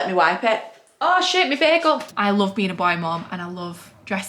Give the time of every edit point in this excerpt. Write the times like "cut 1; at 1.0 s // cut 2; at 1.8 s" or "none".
cut 1; at 2.1 s